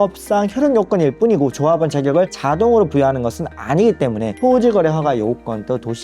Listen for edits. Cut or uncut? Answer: uncut